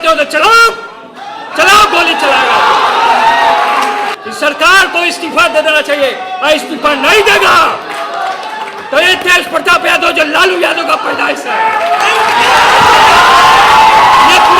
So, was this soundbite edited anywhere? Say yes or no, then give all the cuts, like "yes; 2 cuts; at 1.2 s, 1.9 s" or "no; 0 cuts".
yes; 1 cut; at 4.2 s